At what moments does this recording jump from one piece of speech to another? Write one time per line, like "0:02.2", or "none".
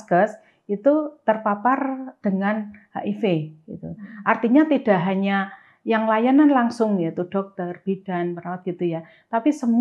none